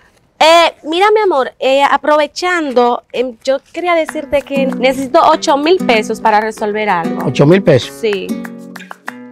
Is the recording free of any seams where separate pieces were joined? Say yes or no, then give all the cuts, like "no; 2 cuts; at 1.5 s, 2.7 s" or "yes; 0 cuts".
yes; 0 cuts